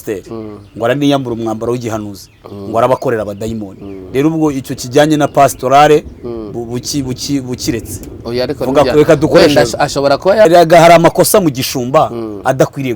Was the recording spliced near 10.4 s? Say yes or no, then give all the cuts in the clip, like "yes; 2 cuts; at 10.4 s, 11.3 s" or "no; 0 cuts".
yes; 1 cut; at 10.4 s